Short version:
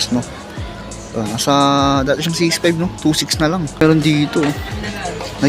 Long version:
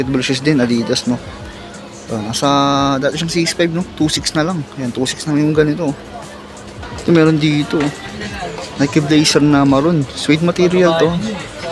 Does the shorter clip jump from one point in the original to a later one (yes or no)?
yes